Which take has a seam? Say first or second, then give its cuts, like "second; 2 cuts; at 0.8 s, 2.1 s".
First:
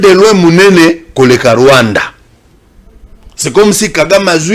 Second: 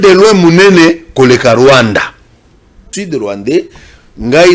second; 1 cut; at 2.9 s